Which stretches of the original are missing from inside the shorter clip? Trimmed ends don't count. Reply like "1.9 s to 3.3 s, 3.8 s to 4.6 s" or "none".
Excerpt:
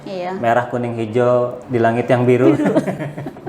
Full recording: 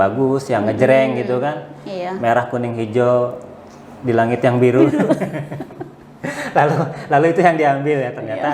3.4 s to 3.9 s